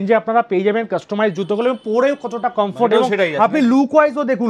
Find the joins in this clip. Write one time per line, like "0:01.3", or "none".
none